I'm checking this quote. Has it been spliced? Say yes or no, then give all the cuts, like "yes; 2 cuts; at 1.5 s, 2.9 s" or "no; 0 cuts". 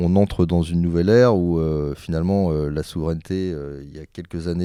no; 0 cuts